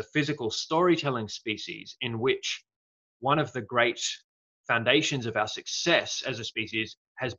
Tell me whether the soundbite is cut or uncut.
uncut